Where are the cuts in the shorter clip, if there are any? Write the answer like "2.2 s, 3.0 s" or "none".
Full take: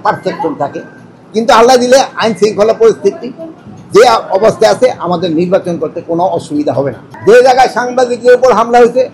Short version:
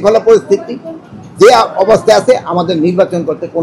none